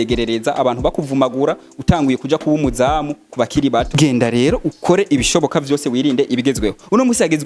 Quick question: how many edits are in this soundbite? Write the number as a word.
one